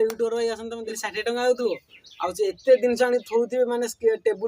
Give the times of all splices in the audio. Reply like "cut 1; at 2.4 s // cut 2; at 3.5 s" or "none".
cut 1; at 1.0 s